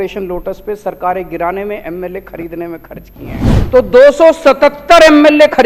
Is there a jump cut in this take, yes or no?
yes